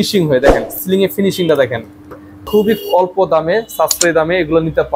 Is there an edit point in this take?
yes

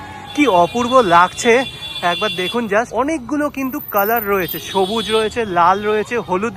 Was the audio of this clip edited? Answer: yes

